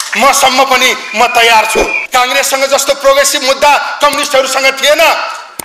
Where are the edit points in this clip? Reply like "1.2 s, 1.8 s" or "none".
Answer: 2.0 s